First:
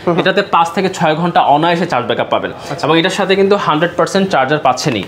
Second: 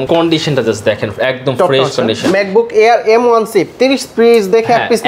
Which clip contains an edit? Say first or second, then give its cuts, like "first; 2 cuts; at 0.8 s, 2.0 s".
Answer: second; 1 cut; at 2.3 s